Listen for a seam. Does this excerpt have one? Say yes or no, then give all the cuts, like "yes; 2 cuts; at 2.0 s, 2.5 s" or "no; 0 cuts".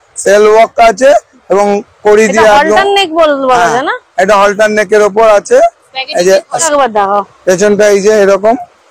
yes; 1 cut; at 6.7 s